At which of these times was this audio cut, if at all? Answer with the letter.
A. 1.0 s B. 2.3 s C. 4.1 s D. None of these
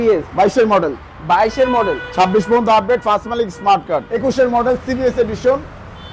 C